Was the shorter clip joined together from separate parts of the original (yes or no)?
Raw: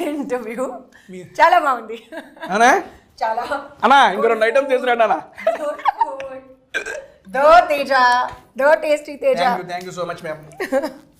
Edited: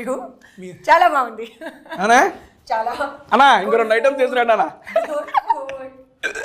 no